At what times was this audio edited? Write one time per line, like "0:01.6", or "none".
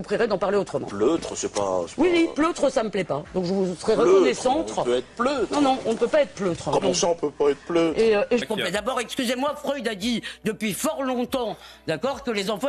0:08.4